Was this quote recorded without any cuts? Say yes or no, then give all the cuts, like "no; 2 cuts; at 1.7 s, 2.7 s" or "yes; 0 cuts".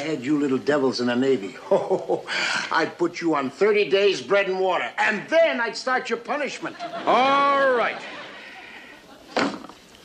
yes; 0 cuts